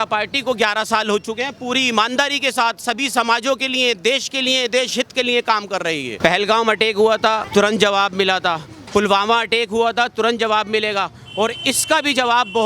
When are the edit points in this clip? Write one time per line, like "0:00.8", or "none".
0:06.1
0:07.4